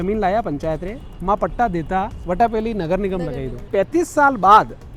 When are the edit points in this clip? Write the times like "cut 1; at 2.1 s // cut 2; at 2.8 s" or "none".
cut 1; at 3.6 s